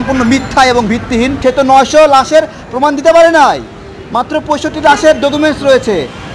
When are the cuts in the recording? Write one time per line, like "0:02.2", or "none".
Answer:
0:01.4